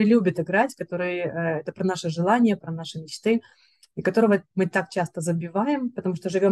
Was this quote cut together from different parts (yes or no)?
no